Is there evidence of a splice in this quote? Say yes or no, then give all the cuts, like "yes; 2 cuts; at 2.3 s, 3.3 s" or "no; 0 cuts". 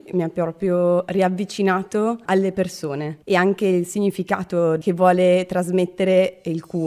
no; 0 cuts